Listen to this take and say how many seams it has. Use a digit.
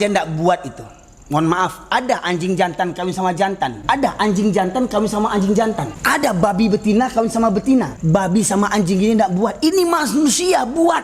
3